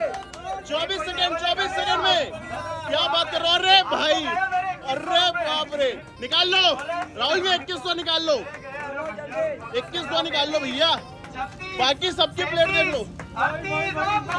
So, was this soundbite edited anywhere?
no; 0 cuts

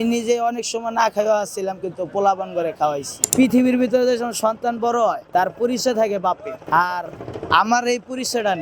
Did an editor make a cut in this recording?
yes; 3 cuts; at 3.1 s, 5.2 s, 6.5 s

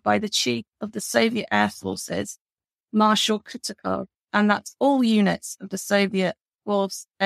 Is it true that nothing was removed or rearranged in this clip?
yes; 0 cuts

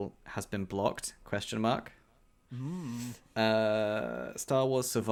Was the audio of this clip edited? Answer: no; 0 cuts

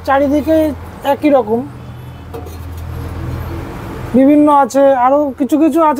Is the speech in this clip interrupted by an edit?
no; 0 cuts

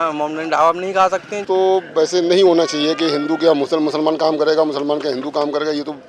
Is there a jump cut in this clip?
yes; 1 cut; at 1.4 s

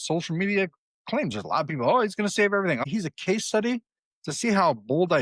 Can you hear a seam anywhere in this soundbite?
yes; 1 cut; at 2.8 s

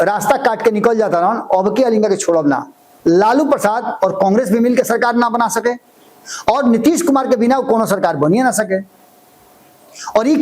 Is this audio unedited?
no; 1 cut; at 2.9 s

